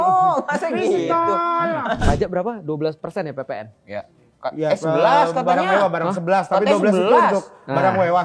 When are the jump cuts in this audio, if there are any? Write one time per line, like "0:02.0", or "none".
0:02.0